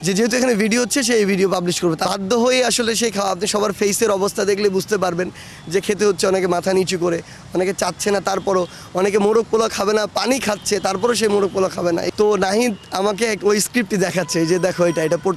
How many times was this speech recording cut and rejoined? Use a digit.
2